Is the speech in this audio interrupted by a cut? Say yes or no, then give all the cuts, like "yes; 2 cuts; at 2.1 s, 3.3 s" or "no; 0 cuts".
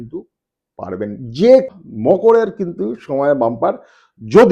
yes; 1 cut; at 1.7 s